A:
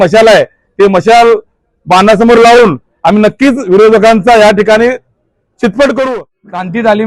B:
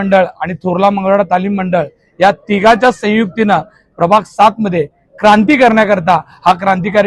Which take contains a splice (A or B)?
A